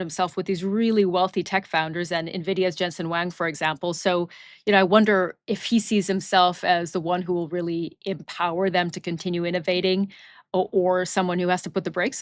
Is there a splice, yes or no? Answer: no